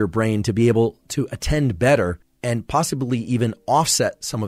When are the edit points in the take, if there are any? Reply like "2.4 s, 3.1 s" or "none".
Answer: 2.3 s